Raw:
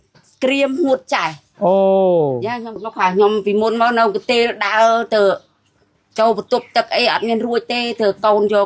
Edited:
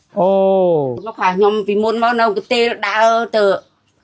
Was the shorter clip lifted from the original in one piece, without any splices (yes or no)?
no